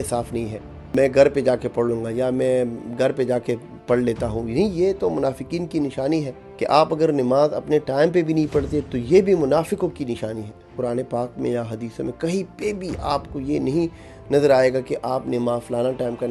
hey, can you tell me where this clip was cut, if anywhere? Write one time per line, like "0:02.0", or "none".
0:00.9
0:06.4
0:10.7